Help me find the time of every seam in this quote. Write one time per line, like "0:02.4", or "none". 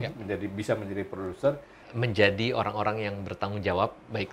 0:01.8